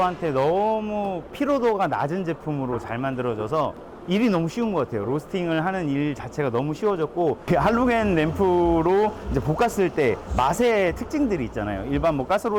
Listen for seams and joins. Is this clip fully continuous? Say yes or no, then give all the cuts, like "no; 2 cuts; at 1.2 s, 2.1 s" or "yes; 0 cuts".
no; 2 cuts; at 3.9 s, 7.5 s